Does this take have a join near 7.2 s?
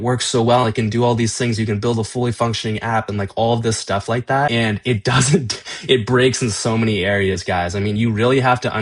no; 1 cut; at 4.5 s

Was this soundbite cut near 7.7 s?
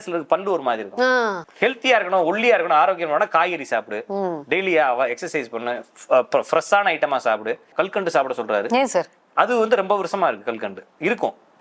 yes; 2 cuts; at 1.4 s, 7.7 s

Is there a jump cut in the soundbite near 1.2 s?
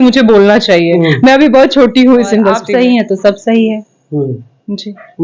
no; 1 cut; at 2.6 s

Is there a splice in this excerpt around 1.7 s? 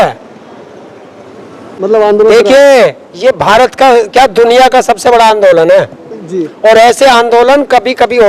yes; 1 cut; at 1.7 s

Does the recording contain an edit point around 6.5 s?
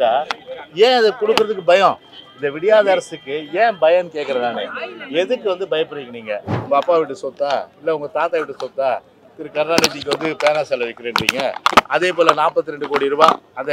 yes; 1 cut; at 6.5 s

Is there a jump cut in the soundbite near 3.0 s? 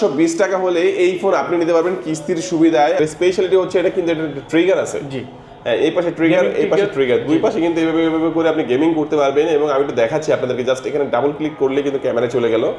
yes; 1 cut; at 3.0 s

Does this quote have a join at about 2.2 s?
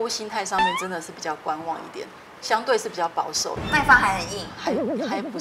no; 1 cut; at 3.6 s

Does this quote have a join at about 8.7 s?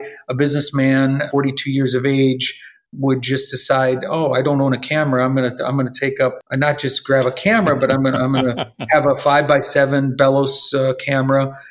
no; 2 cuts; at 1.3 s, 6.4 s

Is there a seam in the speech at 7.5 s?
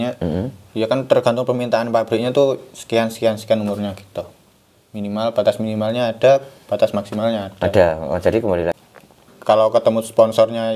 no; 1 cut; at 8.7 s

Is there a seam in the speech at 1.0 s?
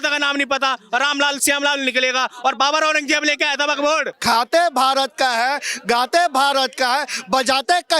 no; 1 cut; at 4.1 s

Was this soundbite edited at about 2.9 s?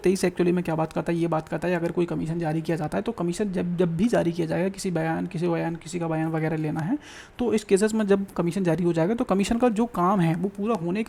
no; 0 cuts

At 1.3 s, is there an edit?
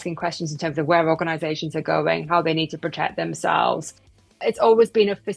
no; 1 cut; at 4.2 s

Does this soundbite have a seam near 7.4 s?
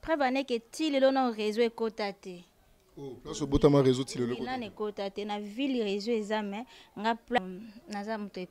yes; 1 cut; at 7.4 s

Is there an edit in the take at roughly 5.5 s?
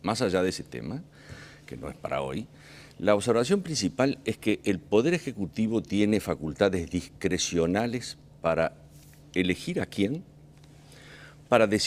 yes; 1 cut; at 5.5 s

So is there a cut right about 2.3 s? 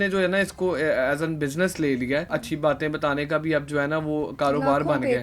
yes; 1 cut; at 2.3 s

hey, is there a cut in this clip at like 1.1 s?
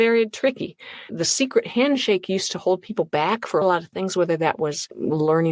yes; 2 cuts; at 1.1 s, 3.6 s

